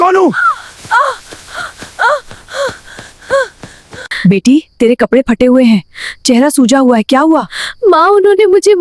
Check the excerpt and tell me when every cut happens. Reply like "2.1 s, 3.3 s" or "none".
none